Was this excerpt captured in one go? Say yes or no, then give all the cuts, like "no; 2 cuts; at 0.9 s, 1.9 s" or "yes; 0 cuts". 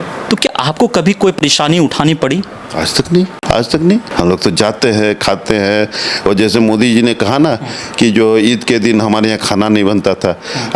no; 2 cuts; at 3.4 s, 4.1 s